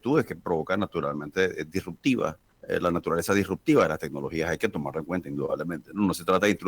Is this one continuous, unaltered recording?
no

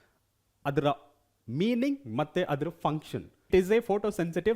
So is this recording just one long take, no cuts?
no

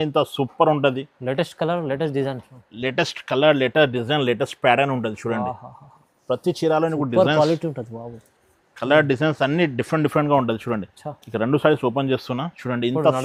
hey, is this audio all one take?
yes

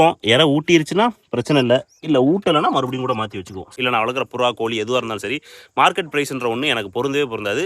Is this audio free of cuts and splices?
no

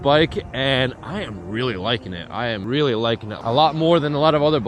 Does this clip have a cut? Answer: yes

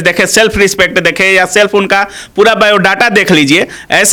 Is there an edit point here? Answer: no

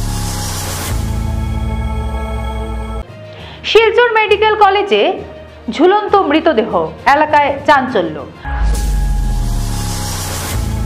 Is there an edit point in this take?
no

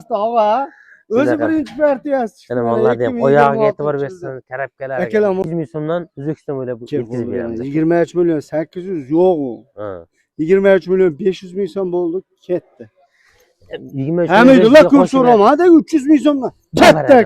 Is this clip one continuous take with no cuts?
no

